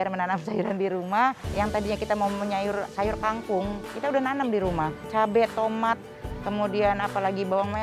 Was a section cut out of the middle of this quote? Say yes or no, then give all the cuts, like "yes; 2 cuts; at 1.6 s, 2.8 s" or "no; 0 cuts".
yes; 3 cuts; at 1.5 s, 2.9 s, 5.0 s